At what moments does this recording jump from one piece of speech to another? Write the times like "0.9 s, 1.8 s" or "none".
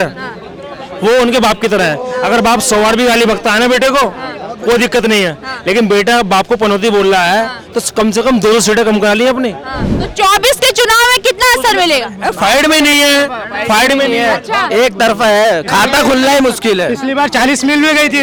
none